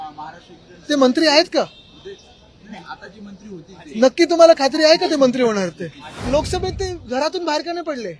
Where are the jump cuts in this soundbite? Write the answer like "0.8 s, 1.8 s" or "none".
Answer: 6.2 s